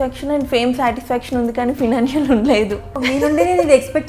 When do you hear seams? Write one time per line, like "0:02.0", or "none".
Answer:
0:03.0